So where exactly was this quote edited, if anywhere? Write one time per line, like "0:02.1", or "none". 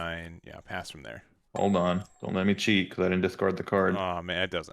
0:01.3
0:02.1

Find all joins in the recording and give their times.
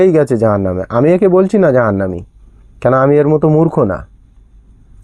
none

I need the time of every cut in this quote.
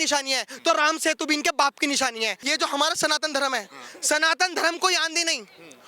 0:02.4

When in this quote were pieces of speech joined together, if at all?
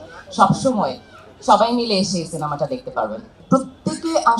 0:03.4

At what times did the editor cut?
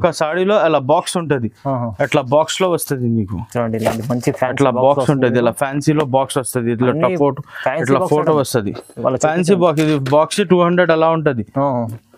none

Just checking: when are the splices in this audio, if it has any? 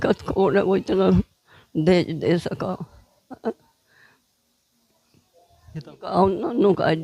0:06.0

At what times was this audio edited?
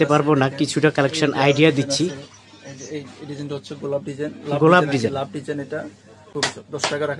0:06.3

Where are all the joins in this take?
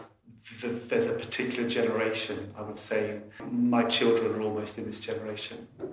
0:03.4

